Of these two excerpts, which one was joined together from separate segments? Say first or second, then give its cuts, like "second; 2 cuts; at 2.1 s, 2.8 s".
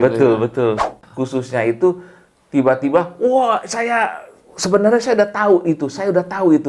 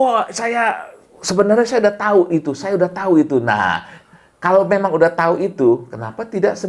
first; 1 cut; at 1.0 s